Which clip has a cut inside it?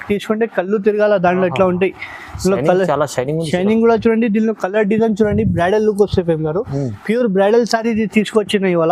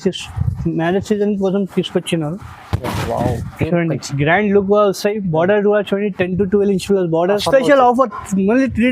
second; 1 cut; at 7.3 s

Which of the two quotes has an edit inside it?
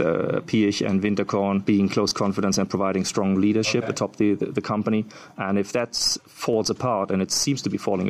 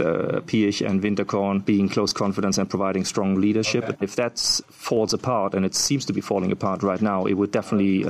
second; 1 cut; at 4.0 s

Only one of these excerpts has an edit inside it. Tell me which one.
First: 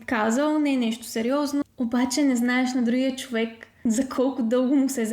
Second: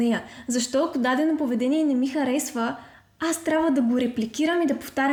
first; 2 cuts; at 1.6 s, 3.7 s

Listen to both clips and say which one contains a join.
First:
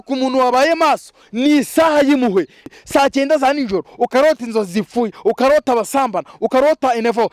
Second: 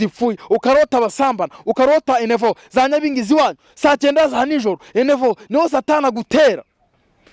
first; 1 cut; at 2.7 s

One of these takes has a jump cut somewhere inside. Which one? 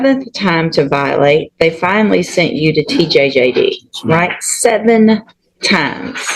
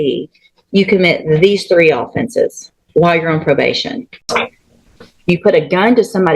second; 1 cut; at 4.2 s

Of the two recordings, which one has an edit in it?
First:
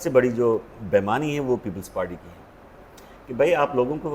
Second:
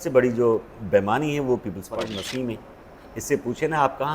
second; 1 cut; at 2.0 s

